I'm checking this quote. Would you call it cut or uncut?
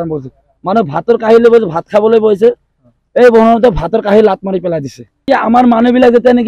cut